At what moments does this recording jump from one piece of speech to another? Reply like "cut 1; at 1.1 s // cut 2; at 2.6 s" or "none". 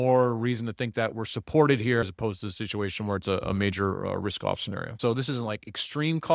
cut 1; at 2.0 s // cut 2; at 5.0 s